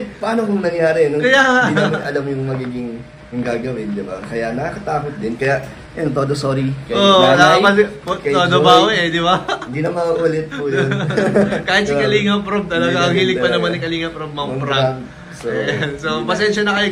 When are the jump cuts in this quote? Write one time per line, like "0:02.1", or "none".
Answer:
none